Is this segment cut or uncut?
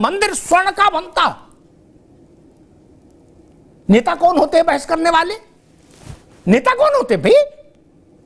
uncut